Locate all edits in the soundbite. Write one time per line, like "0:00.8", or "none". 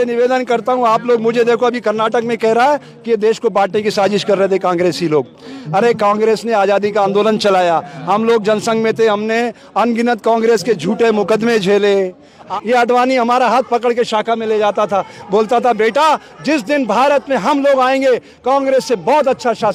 none